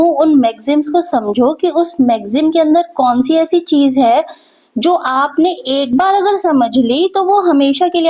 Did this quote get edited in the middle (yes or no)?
no